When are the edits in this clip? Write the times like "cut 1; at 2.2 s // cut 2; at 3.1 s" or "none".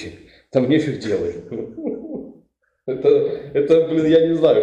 none